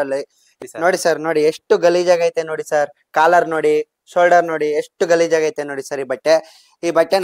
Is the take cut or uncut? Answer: uncut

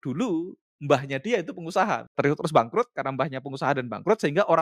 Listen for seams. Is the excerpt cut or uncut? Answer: cut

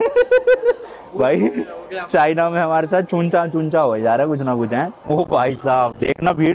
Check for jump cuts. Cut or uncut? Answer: cut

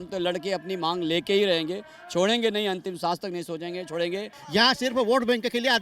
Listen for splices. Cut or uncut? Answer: cut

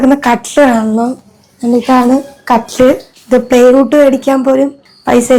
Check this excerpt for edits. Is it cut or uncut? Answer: uncut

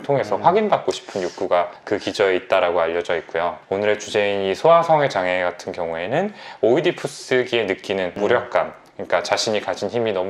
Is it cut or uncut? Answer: uncut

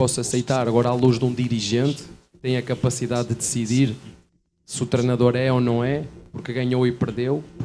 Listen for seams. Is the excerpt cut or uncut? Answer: uncut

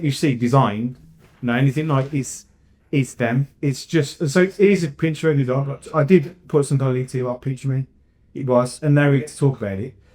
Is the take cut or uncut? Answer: uncut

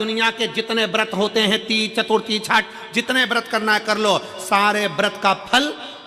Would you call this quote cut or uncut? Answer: uncut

